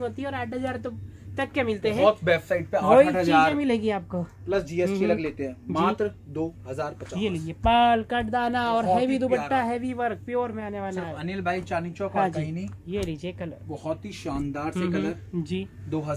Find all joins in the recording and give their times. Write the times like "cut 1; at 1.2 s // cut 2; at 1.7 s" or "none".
none